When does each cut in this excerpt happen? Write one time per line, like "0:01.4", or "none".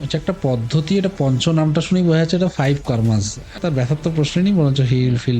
0:03.6